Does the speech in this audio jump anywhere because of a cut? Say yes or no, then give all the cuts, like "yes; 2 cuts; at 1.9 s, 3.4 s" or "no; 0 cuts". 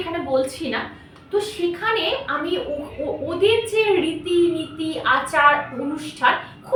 no; 0 cuts